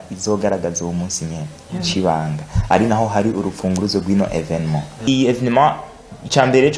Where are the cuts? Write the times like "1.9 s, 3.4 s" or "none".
5.1 s